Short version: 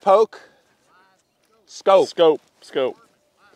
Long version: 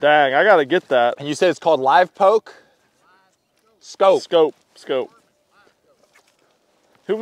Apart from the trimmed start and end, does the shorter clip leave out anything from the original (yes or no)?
no